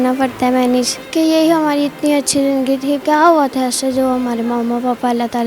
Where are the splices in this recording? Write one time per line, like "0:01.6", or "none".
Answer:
0:01.0
0:03.0